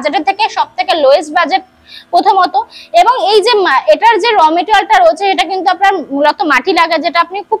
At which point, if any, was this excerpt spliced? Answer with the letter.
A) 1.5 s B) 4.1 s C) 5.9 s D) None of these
D